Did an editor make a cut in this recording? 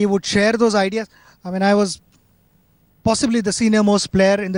no; 0 cuts

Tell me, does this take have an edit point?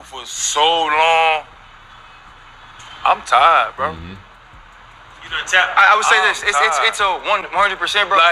no; 0 cuts

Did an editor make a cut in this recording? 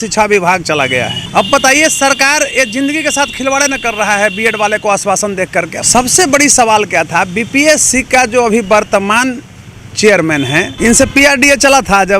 yes; 3 cuts; at 1.2 s, 5.8 s, 10.7 s

